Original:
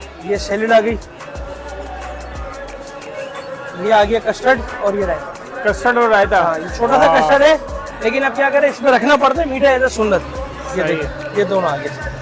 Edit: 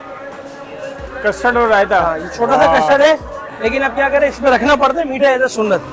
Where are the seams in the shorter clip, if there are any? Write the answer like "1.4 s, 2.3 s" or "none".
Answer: 1.0 s